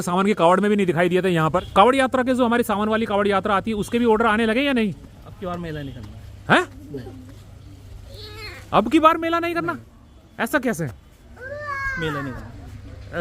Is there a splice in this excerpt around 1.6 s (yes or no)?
yes